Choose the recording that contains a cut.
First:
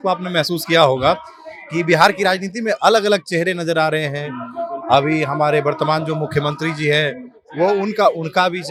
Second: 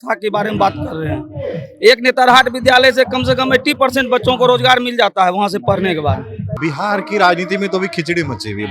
second; 1 cut; at 6.5 s

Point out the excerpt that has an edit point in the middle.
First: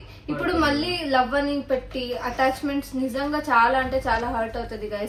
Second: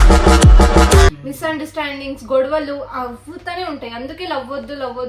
second; 1 cut; at 1.2 s

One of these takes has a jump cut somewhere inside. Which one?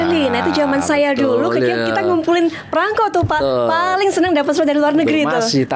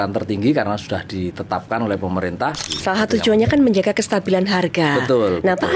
second; 1 cut; at 2.7 s

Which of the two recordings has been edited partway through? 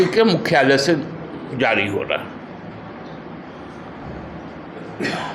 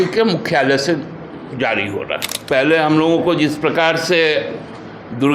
second; 1 cut; at 2.3 s

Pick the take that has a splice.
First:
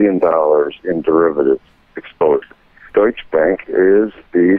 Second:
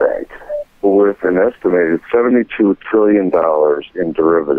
first; 1 cut; at 2.8 s

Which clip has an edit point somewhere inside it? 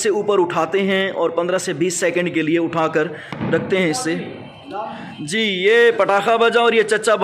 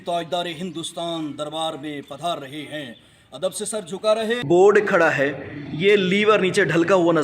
second; 1 cut; at 4.4 s

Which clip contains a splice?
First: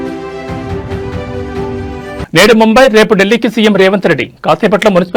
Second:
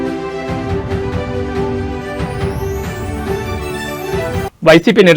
second; 2 cuts; at 2.0 s, 3.7 s

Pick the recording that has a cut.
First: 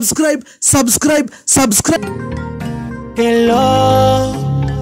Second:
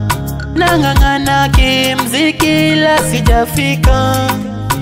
first; 1 cut; at 2.0 s

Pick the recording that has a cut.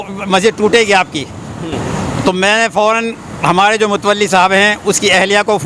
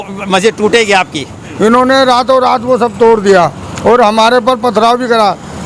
second; 1 cut; at 1.4 s

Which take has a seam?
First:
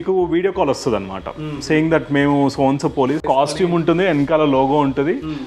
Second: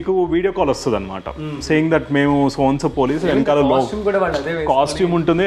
first; 1 cut; at 3.2 s

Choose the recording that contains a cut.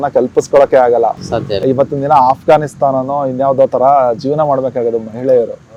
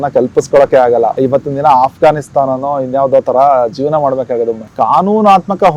second; 2 cuts; at 1.2 s, 4.6 s

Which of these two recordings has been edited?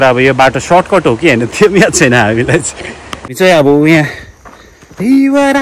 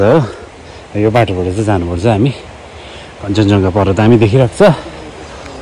first; 1 cut; at 3.4 s

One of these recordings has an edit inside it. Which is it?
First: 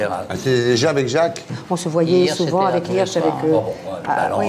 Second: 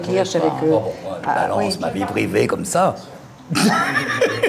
first; 1 cut; at 1.6 s

